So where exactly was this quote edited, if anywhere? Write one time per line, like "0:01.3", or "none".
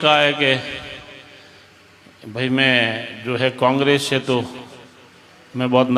none